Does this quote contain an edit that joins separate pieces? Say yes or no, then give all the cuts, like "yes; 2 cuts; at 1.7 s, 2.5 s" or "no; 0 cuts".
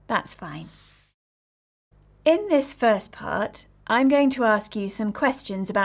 yes; 1 cut; at 1.9 s